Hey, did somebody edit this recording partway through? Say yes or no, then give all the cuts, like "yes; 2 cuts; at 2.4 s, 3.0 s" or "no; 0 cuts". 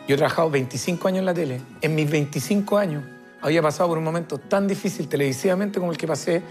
no; 0 cuts